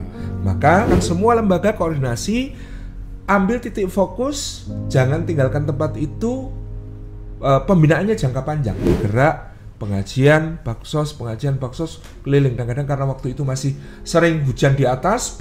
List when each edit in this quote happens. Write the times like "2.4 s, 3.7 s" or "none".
0.9 s, 8.8 s, 12.6 s